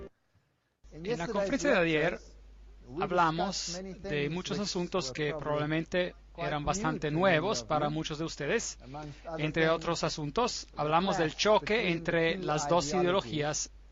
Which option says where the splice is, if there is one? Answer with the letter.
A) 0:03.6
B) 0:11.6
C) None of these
C